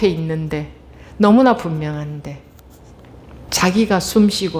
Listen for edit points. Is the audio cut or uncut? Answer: cut